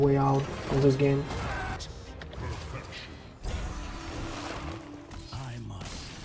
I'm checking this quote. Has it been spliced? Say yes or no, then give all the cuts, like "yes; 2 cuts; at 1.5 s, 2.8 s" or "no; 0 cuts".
yes; 1 cut; at 1.4 s